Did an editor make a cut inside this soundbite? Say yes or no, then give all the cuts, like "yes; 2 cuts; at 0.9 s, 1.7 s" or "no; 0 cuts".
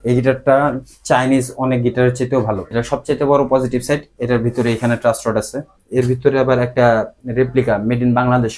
yes; 2 cuts; at 2.6 s, 5.8 s